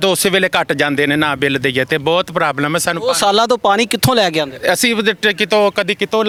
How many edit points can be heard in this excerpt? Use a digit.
0